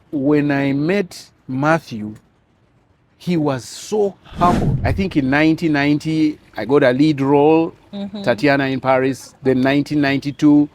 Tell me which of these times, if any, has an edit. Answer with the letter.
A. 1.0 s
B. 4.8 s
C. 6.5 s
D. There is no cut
B